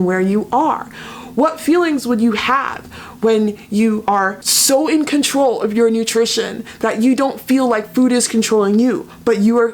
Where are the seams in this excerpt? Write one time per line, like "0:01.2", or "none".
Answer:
0:04.1